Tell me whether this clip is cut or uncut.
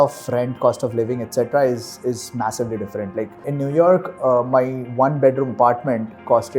uncut